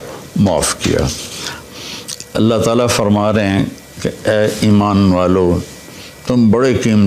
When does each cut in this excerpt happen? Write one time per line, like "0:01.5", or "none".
0:01.6